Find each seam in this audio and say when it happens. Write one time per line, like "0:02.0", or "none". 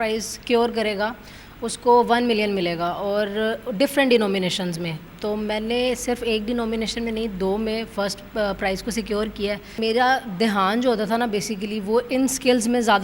0:09.8